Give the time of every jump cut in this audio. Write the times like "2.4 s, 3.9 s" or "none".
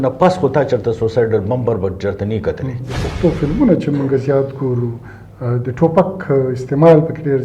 3.0 s